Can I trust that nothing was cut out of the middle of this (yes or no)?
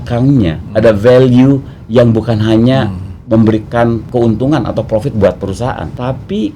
no